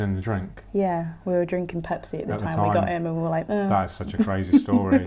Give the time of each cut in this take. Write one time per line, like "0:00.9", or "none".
none